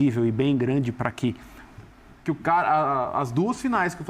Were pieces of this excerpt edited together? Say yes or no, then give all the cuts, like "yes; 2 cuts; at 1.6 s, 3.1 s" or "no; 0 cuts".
yes; 1 cut; at 1.7 s